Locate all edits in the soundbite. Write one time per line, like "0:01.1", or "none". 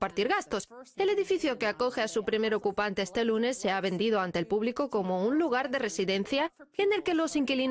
0:04.8